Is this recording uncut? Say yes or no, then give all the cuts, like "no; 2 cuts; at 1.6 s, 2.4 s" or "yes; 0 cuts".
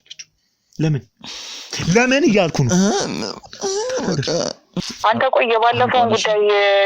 no; 1 cut; at 4.9 s